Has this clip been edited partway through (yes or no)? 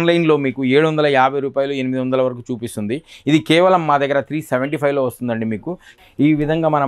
yes